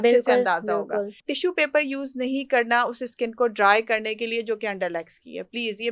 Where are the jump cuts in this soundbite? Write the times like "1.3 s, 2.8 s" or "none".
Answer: 1.2 s